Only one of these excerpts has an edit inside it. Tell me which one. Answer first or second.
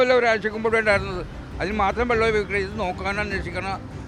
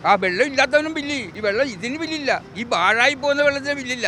second